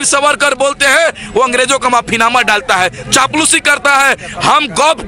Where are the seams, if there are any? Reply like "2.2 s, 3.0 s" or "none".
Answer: none